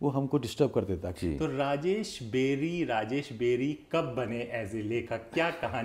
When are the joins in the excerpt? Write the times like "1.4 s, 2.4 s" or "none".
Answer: 1.1 s